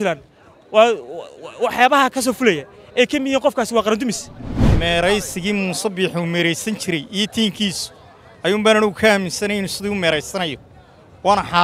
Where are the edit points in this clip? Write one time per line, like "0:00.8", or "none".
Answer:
0:04.6